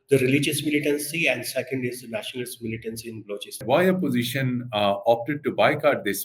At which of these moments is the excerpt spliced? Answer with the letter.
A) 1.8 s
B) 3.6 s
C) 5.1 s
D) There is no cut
B